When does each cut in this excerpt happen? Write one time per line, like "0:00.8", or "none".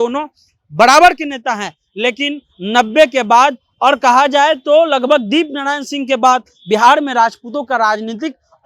none